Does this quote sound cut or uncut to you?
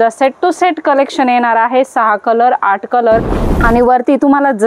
cut